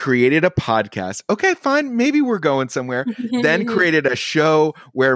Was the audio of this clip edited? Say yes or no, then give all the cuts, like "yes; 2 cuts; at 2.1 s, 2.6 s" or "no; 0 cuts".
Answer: no; 0 cuts